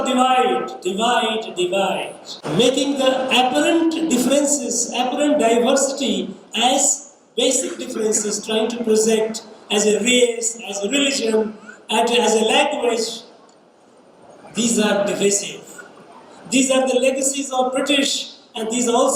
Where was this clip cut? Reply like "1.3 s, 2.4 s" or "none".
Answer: 2.3 s